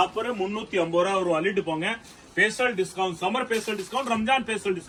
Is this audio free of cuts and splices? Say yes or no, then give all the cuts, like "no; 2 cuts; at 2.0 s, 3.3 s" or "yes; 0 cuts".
yes; 0 cuts